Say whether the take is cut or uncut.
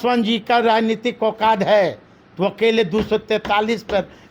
uncut